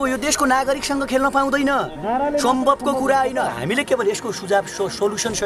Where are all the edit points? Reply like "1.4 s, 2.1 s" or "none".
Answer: none